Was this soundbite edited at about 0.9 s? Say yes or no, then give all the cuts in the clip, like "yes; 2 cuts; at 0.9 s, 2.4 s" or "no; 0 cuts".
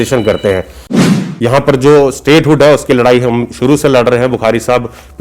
yes; 1 cut; at 0.9 s